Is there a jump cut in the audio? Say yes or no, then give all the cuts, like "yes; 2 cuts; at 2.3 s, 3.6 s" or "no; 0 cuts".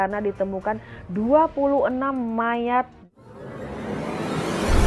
yes; 1 cut; at 3.4 s